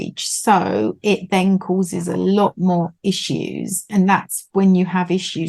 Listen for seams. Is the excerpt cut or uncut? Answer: cut